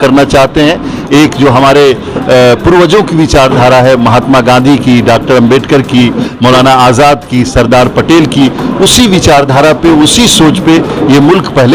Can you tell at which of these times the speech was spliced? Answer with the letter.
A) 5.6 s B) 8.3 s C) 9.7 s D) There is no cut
D